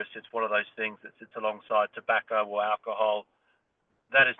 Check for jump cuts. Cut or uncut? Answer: uncut